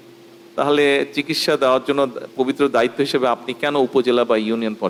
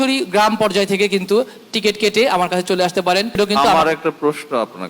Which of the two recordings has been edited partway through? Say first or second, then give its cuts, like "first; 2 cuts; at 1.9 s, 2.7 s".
second; 1 cut; at 3.4 s